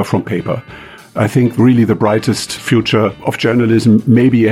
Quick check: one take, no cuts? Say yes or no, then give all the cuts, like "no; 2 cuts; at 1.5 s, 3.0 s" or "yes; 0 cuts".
no; 2 cuts; at 1.1 s, 2.7 s